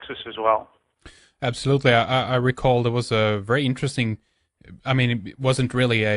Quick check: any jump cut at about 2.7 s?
yes; 1 cut; at 2.7 s

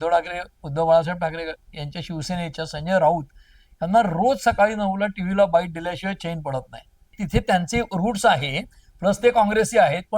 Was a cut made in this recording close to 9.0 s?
no; 1 cut; at 7.1 s

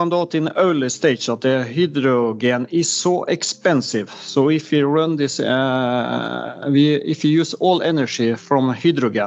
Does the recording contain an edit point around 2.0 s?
no; 0 cuts

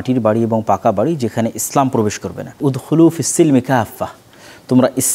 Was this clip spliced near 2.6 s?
yes; 1 cut; at 2.6 s

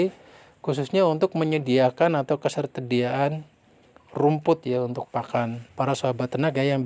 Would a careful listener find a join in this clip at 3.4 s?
no; 1 cut; at 5.6 s

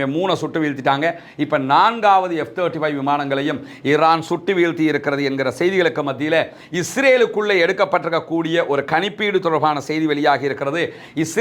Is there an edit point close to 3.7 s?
no; 0 cuts

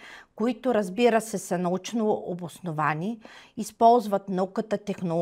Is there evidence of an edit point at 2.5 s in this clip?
no; 0 cuts

